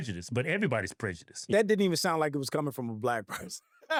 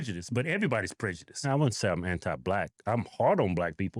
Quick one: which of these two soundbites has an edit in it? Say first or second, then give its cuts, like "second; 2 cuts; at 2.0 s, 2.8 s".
second; 1 cut; at 1.3 s